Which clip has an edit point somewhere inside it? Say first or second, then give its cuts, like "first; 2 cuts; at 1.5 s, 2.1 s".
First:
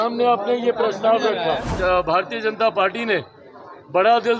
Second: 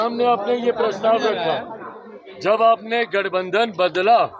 first; 1 cut; at 1.7 s